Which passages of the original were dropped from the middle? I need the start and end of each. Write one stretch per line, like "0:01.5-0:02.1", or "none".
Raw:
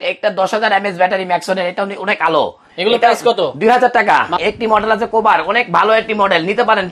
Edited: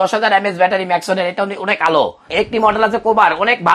0:02.7-0:04.3